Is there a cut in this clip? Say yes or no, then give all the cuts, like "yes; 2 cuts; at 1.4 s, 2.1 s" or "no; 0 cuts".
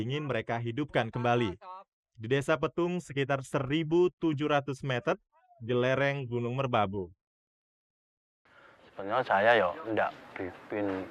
yes; 1 cut; at 8.5 s